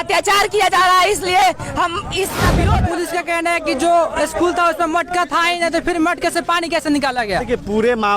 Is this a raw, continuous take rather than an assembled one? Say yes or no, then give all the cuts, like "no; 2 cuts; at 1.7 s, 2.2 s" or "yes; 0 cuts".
no; 1 cut; at 2.7 s